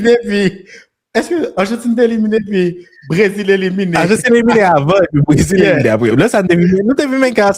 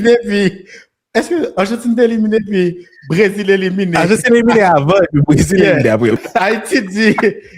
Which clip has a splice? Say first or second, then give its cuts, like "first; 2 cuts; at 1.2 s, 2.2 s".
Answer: second; 1 cut; at 6.2 s